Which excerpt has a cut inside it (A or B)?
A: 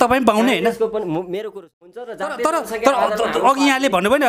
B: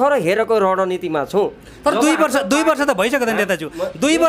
A